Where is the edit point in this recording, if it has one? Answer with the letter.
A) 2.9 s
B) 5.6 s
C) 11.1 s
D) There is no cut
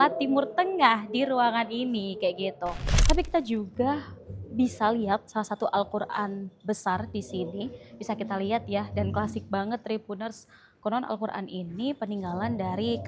A